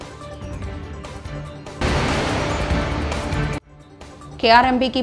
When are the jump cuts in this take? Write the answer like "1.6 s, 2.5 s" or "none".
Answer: 1.8 s, 3.8 s